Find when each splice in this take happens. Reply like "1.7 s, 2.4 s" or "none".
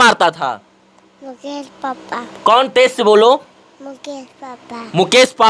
none